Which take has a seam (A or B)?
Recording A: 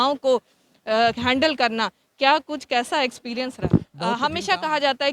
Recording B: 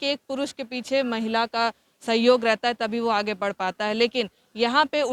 A